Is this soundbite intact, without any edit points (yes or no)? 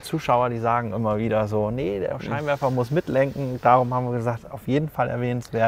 yes